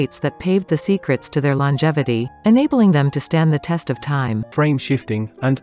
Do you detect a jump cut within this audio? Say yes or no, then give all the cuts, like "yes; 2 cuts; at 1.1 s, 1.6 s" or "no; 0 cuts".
yes; 1 cut; at 4.5 s